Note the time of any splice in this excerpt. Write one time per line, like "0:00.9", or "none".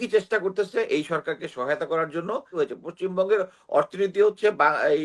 0:02.5